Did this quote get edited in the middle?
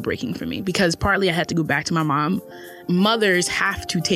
yes; 1 cut; at 2.8 s

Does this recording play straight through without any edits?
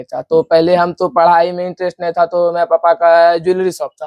yes; 0 cuts

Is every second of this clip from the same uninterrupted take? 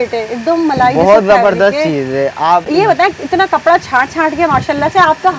yes; 0 cuts

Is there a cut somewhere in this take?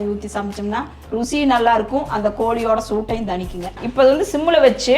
yes; 1 cut; at 3.8 s

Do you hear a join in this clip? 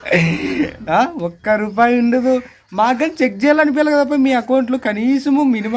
no; 0 cuts

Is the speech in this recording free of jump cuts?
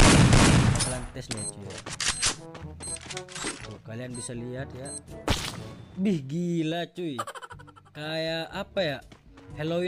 yes; 0 cuts

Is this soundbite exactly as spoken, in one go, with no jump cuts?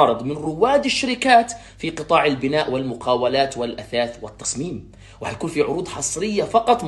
no; 1 cut; at 2.7 s

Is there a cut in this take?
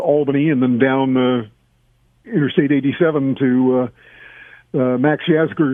no; 0 cuts

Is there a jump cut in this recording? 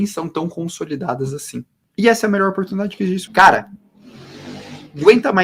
yes; 2 cuts; at 1.8 s, 3.2 s

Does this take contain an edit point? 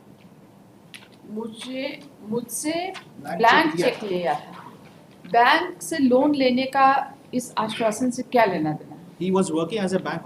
no; 0 cuts

